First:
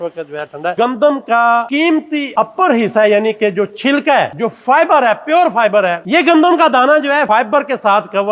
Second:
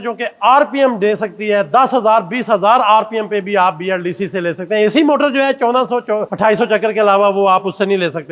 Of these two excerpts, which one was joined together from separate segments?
first; 4 cuts; at 0.7 s, 4.3 s, 6.0 s, 7.3 s

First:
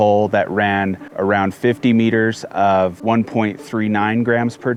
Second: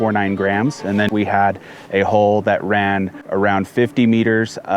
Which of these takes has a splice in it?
second; 1 cut; at 1.1 s

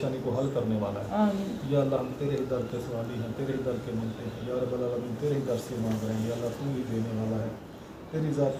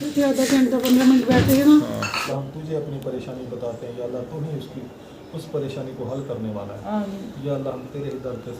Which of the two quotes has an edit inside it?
second; 1 cut; at 2.2 s

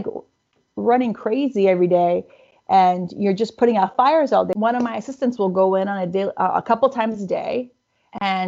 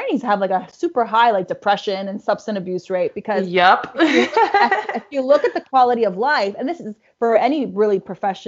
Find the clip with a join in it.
first; 1 cut; at 4.5 s

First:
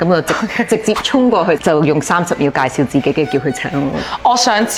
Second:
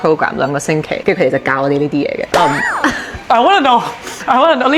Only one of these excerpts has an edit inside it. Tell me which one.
second; 1 cut; at 1.0 s

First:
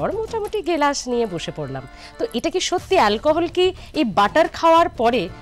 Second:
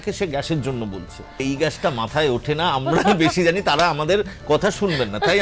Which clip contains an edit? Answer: second; 1 cut; at 1.4 s

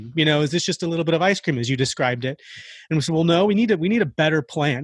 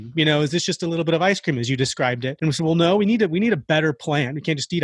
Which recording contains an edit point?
second; 1 cut; at 2.3 s

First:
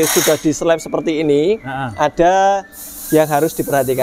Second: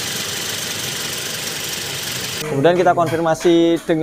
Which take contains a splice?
second; 1 cut; at 2.4 s

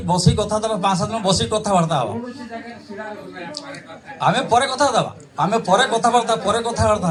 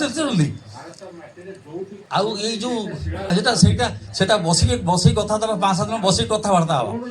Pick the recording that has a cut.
second; 2 cuts; at 2.0 s, 3.3 s

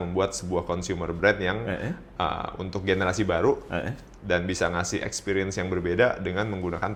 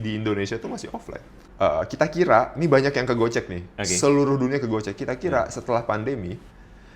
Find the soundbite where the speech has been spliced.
second; 1 cut; at 1.4 s

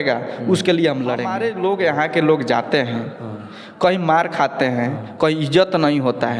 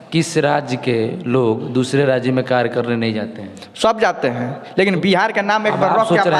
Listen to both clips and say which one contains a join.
first; 1 cut; at 1.3 s

